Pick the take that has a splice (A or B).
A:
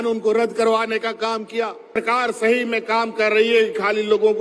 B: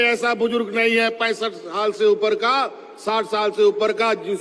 A